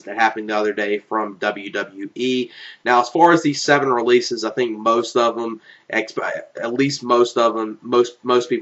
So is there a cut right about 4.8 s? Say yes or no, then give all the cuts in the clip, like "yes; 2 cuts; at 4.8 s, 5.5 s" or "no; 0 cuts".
no; 1 cut; at 2.1 s